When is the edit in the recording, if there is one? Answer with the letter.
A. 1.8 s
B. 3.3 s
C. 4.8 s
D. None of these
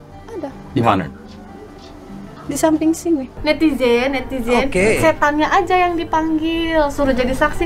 B